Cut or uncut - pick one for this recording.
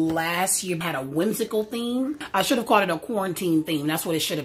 cut